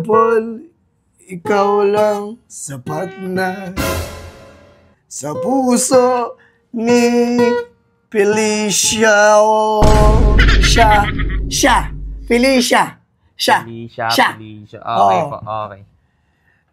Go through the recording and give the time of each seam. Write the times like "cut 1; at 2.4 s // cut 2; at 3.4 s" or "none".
none